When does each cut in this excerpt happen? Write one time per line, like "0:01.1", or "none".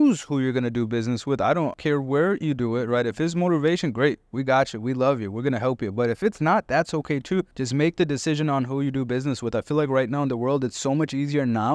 0:01.8
0:07.6